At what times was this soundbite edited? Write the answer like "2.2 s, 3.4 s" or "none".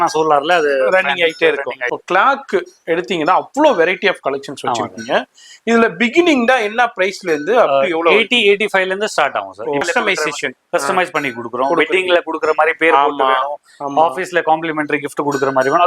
1.9 s, 9.8 s

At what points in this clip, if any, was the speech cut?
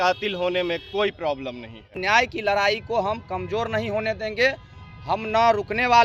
1.9 s

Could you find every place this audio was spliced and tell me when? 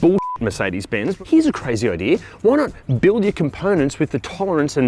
1.1 s

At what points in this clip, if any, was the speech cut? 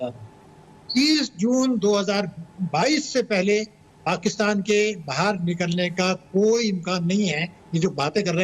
none

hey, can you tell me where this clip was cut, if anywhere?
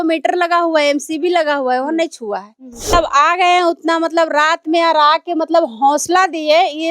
2.9 s

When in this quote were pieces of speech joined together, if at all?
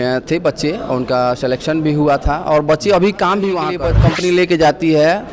3.9 s

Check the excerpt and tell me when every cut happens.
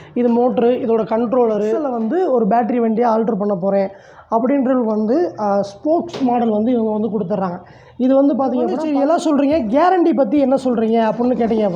1.9 s, 8.8 s

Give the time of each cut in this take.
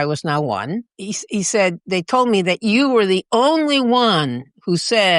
0.9 s, 1.8 s

